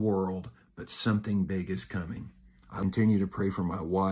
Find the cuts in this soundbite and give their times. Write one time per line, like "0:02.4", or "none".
0:02.6